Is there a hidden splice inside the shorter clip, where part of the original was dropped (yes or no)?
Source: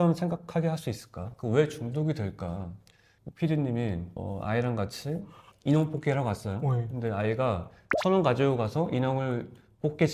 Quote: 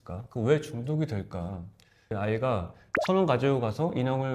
yes